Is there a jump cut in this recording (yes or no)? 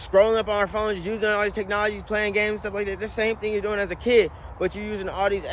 no